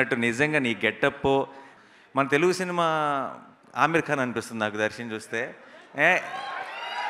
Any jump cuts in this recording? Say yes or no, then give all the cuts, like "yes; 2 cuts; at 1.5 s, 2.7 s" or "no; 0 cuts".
yes; 1 cut; at 1.8 s